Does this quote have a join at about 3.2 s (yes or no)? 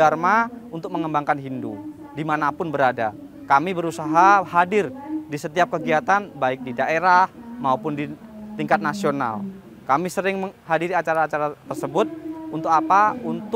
no